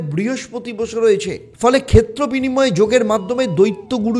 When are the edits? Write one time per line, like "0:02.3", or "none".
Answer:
0:01.4